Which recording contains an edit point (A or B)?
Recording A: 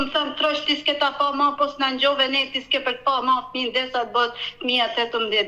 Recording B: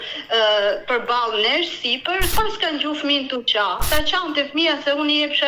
B